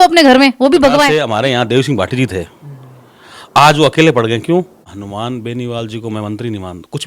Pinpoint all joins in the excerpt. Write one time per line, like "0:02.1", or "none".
0:01.2
0:04.4